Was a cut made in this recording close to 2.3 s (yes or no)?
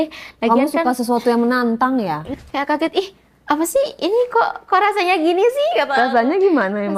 yes